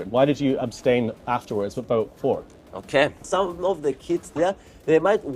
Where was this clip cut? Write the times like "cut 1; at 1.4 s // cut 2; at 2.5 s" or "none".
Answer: cut 1; at 3.2 s